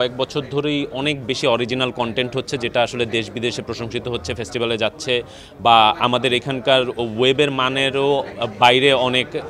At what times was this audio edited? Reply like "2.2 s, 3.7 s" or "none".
none